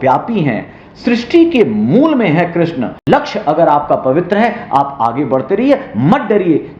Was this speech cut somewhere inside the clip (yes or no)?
yes